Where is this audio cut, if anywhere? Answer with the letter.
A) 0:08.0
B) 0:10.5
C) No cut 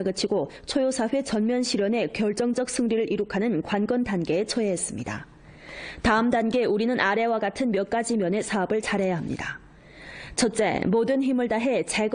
B